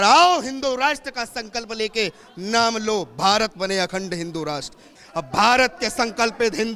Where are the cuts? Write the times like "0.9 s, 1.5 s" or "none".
4.9 s